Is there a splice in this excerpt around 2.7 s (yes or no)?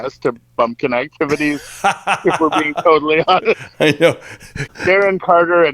no